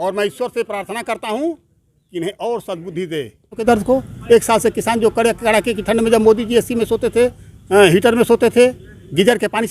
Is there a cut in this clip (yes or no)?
yes